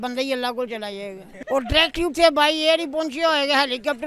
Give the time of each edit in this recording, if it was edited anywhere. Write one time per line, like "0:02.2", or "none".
0:01.3